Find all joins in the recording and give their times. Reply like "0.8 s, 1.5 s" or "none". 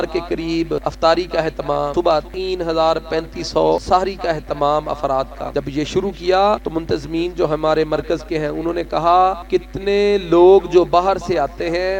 0.8 s, 2.0 s, 3.8 s, 5.4 s, 6.7 s, 9.4 s